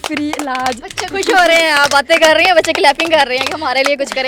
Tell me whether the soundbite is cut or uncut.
uncut